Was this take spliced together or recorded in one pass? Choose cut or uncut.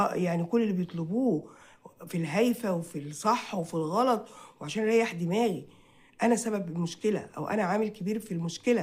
uncut